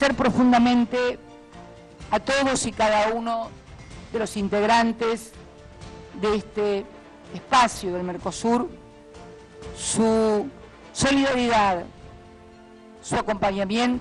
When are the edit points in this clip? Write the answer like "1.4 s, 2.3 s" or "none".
none